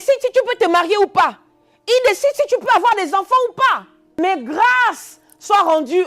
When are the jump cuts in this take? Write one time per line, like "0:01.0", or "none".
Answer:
0:04.0